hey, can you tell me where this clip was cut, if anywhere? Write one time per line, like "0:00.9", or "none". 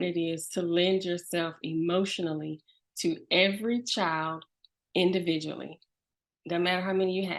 none